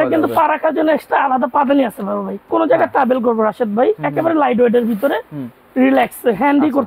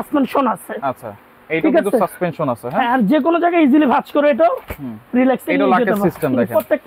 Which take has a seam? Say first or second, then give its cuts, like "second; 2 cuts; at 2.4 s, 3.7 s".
first; 1 cut; at 2.5 s